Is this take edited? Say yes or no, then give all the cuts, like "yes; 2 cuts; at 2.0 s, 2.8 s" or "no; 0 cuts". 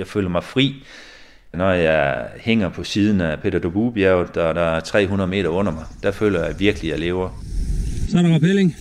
no; 0 cuts